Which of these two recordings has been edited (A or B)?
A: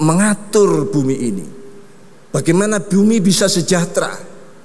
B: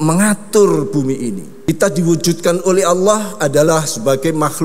B